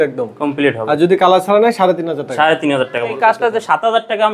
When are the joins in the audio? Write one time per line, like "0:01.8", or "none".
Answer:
0:03.1